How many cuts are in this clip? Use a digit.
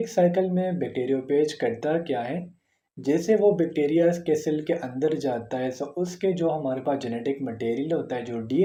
0